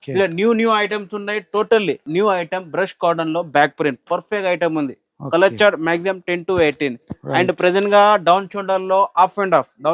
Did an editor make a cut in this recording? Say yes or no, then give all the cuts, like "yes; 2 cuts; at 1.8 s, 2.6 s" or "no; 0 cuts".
yes; 1 cut; at 2.0 s